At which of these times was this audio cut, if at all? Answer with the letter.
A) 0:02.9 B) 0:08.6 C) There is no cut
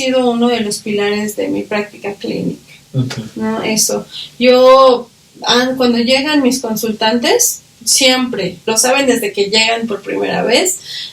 B